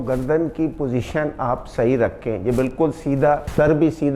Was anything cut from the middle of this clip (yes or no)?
no